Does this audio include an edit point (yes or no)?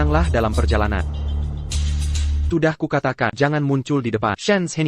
yes